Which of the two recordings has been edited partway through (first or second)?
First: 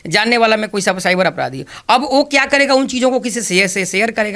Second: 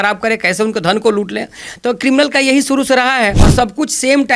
second